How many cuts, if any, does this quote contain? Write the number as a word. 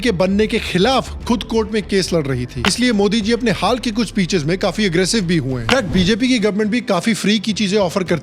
two